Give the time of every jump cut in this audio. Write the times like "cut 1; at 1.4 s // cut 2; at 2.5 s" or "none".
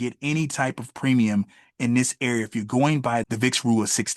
cut 1; at 3.3 s